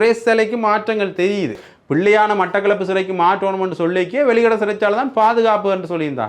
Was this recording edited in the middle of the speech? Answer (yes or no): yes